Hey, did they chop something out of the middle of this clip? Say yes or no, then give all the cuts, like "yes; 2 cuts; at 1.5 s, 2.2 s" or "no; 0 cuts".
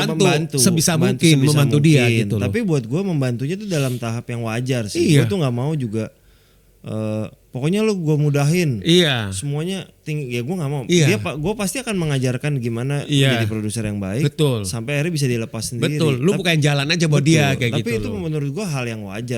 no; 0 cuts